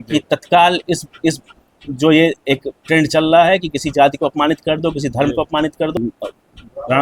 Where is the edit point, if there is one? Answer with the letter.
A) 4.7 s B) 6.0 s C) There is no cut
B